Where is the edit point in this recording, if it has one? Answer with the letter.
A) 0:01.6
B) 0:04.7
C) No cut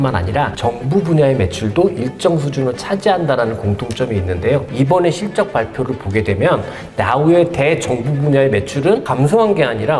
B